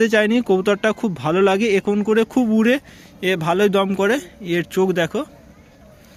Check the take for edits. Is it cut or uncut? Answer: uncut